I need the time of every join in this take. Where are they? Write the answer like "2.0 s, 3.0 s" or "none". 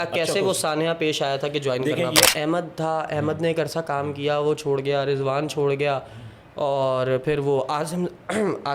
2.3 s